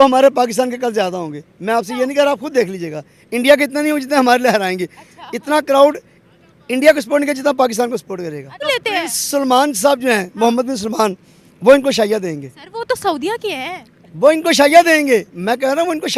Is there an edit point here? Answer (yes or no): yes